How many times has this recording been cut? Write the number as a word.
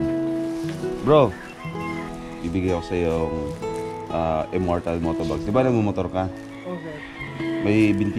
zero